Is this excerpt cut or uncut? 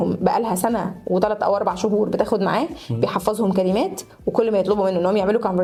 uncut